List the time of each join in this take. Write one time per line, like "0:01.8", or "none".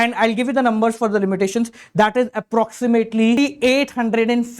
0:03.4